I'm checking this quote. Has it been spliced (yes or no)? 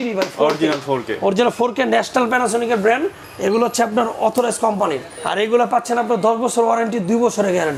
no